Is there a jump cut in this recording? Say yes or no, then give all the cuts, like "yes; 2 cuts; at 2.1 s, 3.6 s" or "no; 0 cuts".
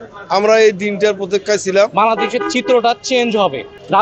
yes; 1 cut; at 1.9 s